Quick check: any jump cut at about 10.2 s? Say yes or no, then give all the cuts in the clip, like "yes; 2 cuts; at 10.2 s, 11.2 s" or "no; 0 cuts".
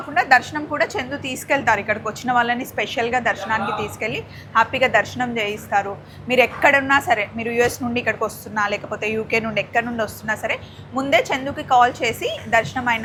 no; 0 cuts